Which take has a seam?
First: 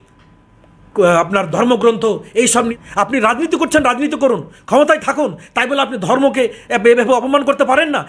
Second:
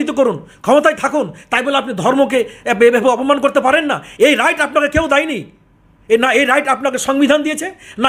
first; 1 cut; at 2.5 s

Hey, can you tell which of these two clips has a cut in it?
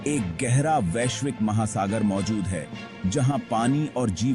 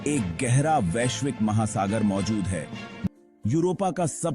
second; 1 cut; at 3.1 s

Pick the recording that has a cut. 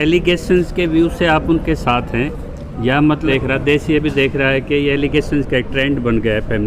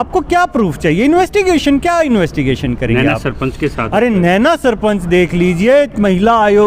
first; 1 cut; at 3.3 s

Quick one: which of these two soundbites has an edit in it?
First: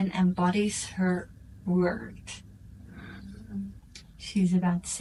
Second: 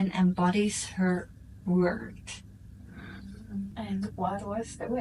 second; 1 cut; at 3.7 s

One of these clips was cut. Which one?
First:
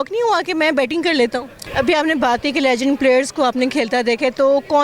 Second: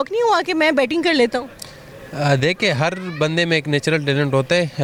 first; 1 cut; at 1.6 s

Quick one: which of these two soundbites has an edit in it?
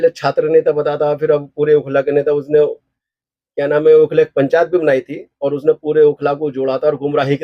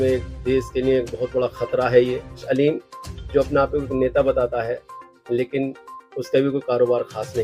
second; 1 cut; at 2.4 s

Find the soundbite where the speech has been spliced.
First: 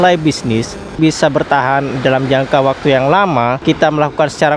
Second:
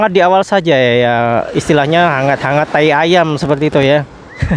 first; 2 cuts; at 1.0 s, 3.6 s

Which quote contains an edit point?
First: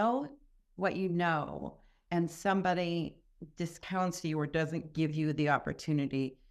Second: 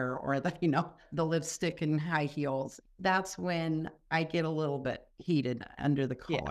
second; 3 cuts; at 1.0 s, 2.8 s, 5.1 s

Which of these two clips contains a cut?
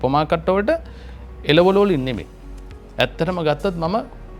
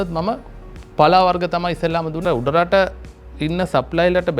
second; 1 cut; at 2.2 s

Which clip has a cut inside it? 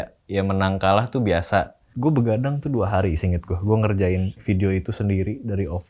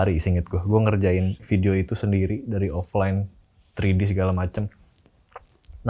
first; 1 cut; at 1.9 s

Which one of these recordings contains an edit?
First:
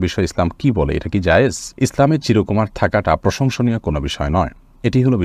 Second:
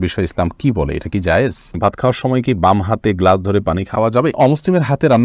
second; 2 cuts; at 1.8 s, 4.2 s

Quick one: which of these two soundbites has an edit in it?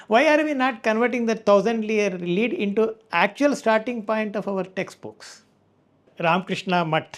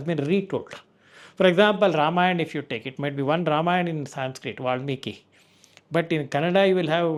first; 1 cut; at 6.1 s

